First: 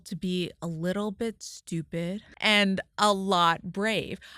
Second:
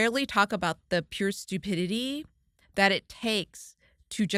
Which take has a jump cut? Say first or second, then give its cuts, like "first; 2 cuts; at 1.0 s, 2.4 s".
first; 1 cut; at 2.3 s